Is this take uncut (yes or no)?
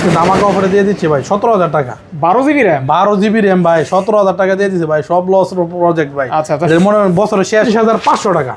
no